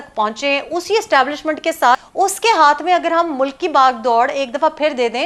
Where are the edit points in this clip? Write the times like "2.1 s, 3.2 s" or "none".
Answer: 2.1 s